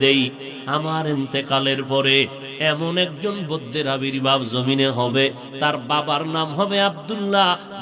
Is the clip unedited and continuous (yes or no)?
no